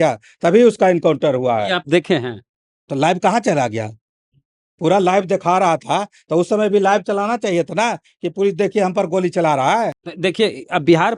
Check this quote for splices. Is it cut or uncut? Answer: uncut